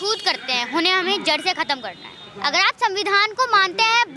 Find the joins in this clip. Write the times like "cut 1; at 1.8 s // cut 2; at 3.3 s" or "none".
cut 1; at 2.2 s